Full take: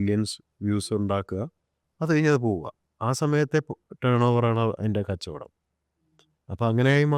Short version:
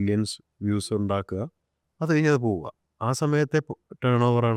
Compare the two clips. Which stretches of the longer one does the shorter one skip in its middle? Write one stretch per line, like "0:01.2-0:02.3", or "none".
none